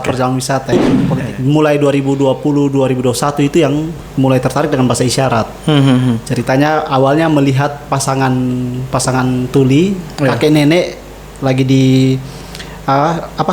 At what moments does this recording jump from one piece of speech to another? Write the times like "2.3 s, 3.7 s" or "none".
1.0 s